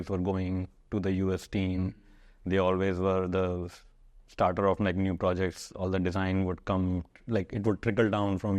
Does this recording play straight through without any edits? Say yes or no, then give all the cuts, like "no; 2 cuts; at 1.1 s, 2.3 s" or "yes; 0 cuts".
yes; 0 cuts